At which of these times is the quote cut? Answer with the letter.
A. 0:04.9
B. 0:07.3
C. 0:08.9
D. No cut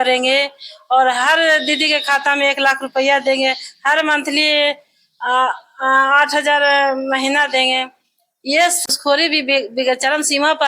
C